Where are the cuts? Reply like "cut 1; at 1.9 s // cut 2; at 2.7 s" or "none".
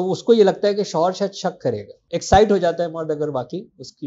cut 1; at 1.9 s